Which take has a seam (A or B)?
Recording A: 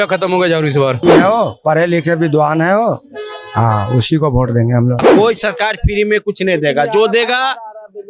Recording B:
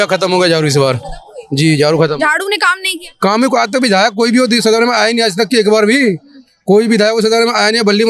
A